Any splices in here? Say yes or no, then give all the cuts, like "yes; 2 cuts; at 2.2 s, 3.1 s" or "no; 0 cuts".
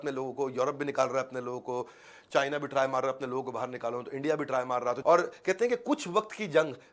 no; 0 cuts